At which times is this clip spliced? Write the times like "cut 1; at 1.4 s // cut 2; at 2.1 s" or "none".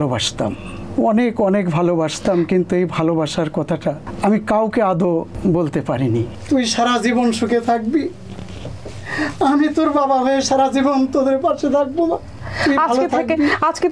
cut 1; at 4.1 s // cut 2; at 5.3 s // cut 3; at 6.3 s // cut 4; at 12.4 s